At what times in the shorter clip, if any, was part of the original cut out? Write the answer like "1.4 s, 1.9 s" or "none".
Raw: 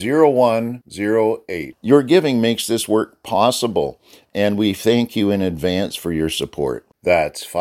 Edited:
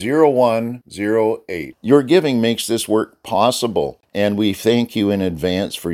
4.0 s